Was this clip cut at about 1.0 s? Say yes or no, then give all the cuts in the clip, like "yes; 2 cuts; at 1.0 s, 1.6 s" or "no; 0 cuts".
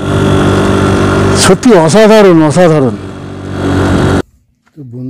no; 1 cut; at 4.2 s